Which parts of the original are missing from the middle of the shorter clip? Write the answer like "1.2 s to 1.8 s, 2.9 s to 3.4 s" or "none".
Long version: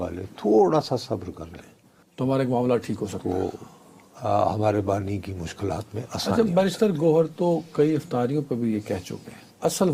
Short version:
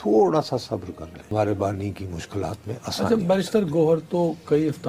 1.7 s to 4.6 s